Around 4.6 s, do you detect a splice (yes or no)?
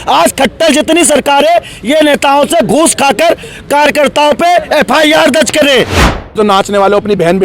no